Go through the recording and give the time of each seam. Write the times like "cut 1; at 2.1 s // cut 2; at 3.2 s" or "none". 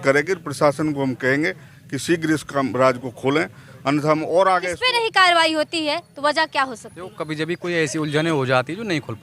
cut 1; at 4.8 s